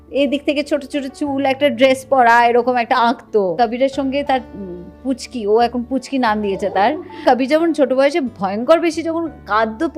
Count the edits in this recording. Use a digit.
2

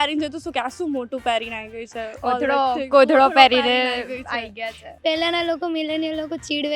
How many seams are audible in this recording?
1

